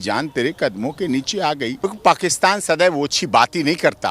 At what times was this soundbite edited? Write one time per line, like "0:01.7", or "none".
0:01.9